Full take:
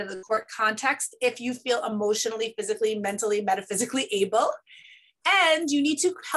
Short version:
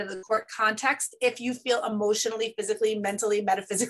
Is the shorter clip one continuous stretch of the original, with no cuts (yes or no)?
yes